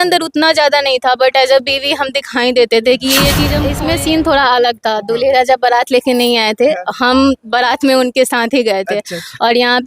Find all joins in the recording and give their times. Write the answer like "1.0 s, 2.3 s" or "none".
3.6 s